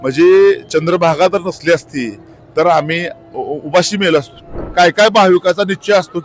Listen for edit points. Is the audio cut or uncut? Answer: cut